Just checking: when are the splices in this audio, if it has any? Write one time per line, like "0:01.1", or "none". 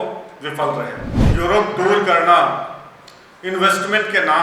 0:01.1